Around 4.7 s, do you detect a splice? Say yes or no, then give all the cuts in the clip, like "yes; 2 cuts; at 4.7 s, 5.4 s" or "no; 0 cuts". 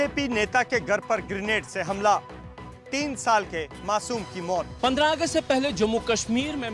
yes; 1 cut; at 4.7 s